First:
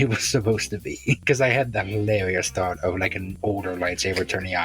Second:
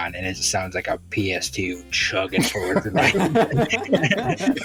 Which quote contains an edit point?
first; 2 cuts; at 1.2 s, 3.3 s

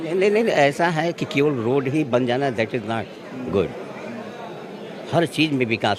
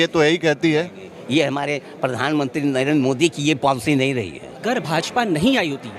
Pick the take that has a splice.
second; 1 cut; at 4.5 s

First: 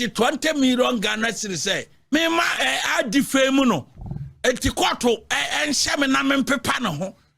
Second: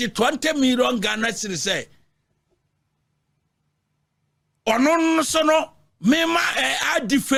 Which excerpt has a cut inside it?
first; 1 cut; at 2.1 s

